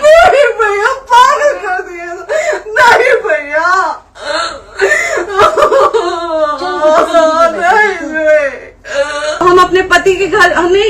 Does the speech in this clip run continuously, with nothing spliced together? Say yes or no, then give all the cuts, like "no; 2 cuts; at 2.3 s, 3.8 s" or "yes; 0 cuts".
no; 1 cut; at 9.4 s